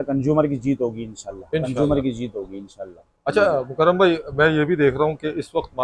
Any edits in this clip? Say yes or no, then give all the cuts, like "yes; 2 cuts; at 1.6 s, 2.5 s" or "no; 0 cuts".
no; 0 cuts